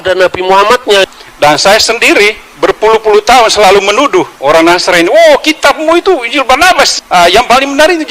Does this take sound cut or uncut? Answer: cut